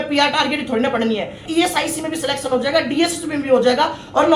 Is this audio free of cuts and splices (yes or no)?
no